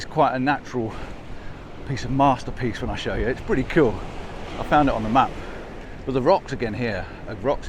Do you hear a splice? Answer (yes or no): no